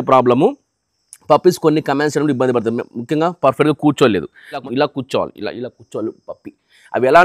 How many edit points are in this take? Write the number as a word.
one